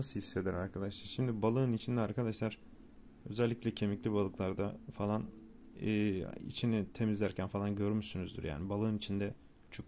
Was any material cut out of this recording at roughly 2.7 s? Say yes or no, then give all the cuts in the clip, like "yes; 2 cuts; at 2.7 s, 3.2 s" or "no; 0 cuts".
no; 0 cuts